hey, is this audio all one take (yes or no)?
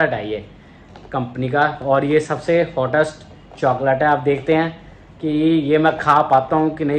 yes